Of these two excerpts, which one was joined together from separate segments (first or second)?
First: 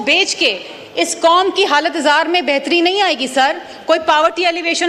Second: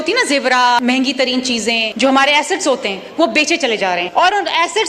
second